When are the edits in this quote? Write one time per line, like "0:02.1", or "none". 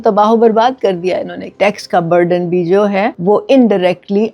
0:01.5
0:03.2